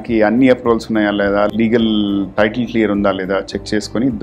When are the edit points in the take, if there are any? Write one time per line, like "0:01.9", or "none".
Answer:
0:01.5